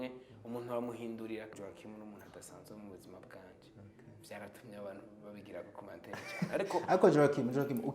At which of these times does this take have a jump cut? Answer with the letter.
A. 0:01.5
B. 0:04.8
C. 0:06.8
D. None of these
A